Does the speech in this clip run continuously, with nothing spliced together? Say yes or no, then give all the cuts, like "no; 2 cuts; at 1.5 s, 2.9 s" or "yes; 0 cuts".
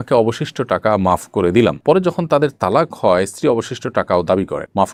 yes; 0 cuts